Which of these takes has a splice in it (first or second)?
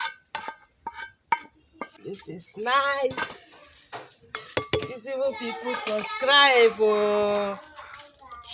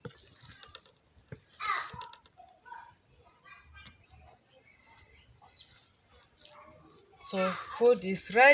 first